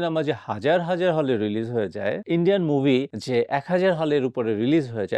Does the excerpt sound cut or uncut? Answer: uncut